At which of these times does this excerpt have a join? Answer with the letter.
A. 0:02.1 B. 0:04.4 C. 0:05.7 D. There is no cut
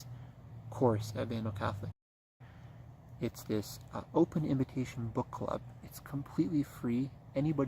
A